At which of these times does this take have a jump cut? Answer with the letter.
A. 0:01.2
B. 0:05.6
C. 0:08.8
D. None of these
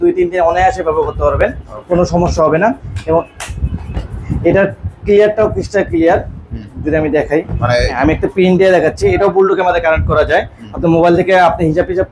D